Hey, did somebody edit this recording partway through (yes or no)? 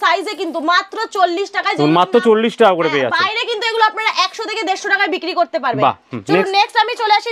no